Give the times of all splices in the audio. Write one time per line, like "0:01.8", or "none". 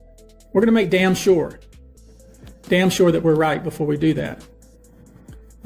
none